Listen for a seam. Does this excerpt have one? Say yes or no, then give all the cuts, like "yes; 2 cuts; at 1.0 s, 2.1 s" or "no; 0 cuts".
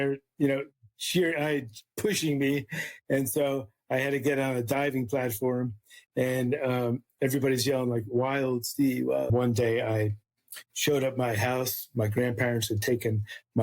yes; 1 cut; at 9.3 s